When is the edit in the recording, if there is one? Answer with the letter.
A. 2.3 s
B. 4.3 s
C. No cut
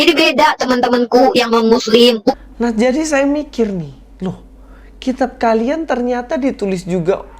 A